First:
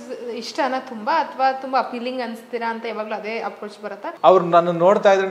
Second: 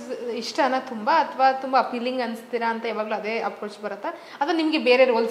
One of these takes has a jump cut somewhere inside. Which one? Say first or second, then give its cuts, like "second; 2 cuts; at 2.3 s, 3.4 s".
first; 1 cut; at 4.1 s